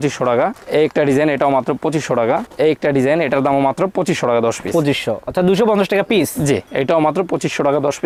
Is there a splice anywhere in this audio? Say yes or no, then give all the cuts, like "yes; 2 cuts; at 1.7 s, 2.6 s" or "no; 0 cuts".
no; 0 cuts